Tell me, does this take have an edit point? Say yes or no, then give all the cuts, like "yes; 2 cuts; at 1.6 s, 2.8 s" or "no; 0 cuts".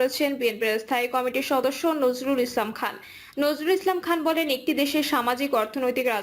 no; 0 cuts